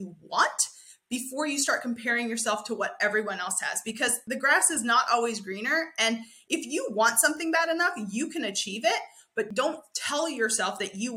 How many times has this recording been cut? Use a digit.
2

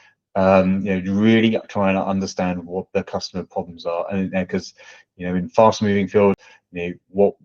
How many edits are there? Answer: 1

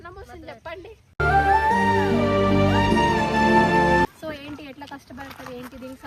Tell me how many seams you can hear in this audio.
1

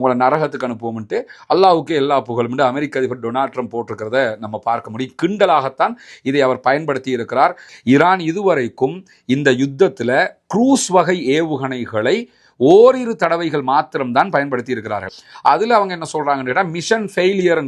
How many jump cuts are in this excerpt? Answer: 2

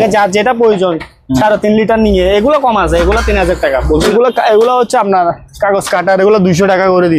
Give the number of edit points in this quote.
1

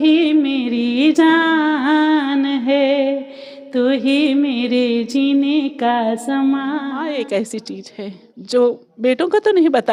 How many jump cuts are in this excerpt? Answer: 2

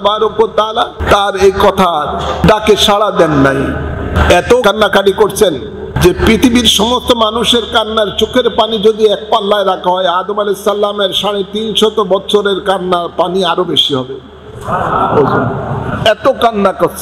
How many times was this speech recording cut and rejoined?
4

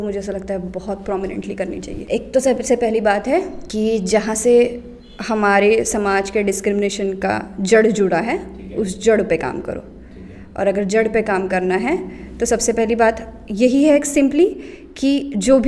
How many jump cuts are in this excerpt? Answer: 2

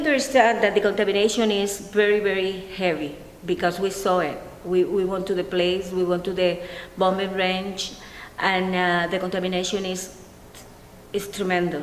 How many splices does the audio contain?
1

